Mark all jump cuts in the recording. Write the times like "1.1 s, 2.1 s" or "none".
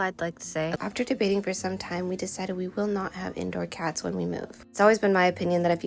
0.8 s, 4.5 s